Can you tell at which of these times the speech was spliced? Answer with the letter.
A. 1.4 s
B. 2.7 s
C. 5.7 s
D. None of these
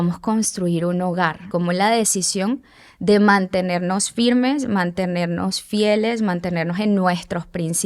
A